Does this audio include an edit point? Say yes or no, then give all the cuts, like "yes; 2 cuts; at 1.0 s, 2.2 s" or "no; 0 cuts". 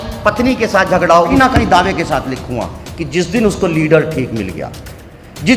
yes; 1 cut; at 1.3 s